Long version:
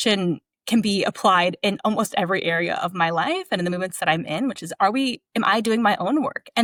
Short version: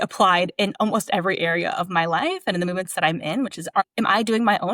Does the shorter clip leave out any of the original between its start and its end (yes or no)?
yes